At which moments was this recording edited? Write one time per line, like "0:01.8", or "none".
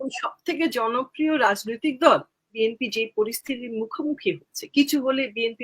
0:02.5